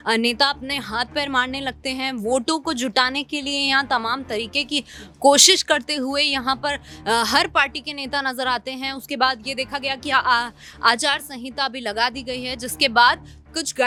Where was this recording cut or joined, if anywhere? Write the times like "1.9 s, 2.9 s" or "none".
none